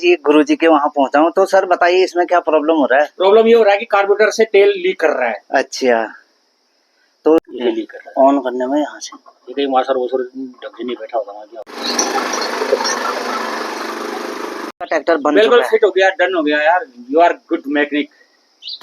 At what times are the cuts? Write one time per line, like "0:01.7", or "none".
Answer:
0:07.4
0:12.0
0:14.9